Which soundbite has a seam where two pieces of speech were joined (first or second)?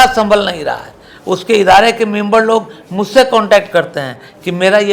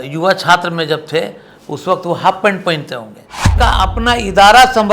second